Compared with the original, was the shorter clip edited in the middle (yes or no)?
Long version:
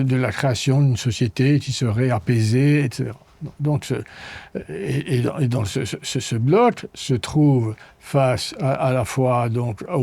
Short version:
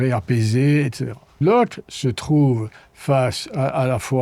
yes